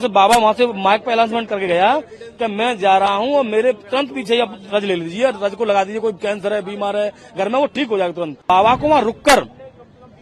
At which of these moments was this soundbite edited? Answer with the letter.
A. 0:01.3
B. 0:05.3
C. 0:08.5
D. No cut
C